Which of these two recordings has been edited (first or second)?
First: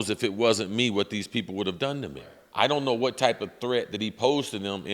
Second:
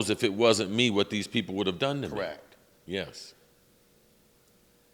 first